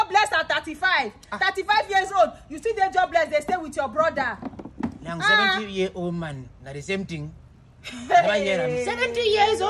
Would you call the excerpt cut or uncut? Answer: uncut